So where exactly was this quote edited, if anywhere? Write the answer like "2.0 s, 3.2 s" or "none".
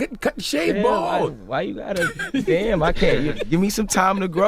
none